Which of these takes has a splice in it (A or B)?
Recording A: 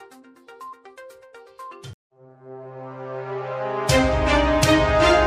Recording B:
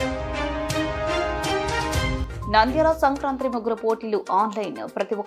B